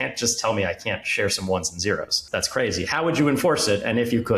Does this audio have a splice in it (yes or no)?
yes